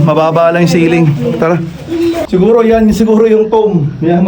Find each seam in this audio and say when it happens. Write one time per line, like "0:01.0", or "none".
0:02.2